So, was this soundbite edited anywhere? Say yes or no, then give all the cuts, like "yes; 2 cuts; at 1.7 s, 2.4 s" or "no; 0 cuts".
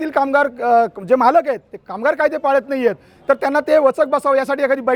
no; 0 cuts